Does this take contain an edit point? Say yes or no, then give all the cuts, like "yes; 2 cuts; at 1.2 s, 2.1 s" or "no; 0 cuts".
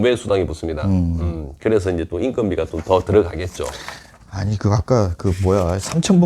no; 0 cuts